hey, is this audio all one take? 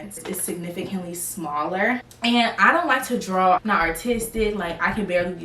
no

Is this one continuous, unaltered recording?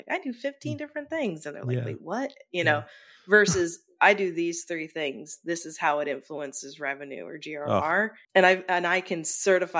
no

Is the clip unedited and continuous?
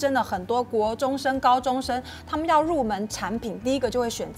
yes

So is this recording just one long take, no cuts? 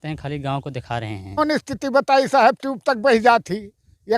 no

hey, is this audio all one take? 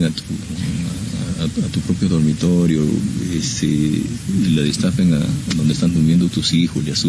yes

